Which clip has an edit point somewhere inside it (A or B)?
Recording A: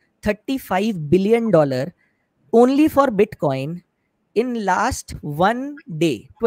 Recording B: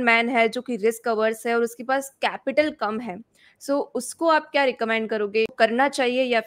B